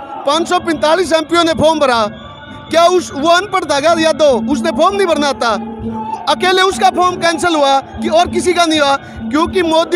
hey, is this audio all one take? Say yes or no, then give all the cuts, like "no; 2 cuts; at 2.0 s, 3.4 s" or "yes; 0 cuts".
yes; 0 cuts